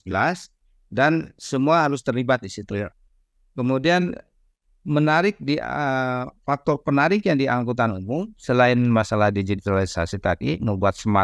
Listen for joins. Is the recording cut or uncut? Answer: uncut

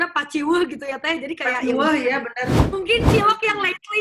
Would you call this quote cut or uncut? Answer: cut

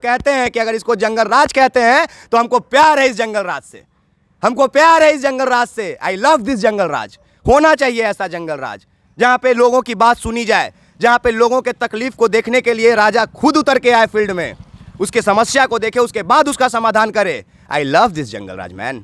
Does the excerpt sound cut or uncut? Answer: uncut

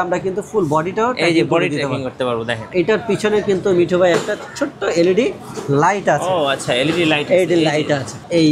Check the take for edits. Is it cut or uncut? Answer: cut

